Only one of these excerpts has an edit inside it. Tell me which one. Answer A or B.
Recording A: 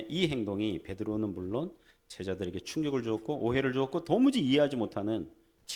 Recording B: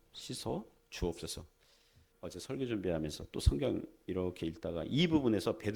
B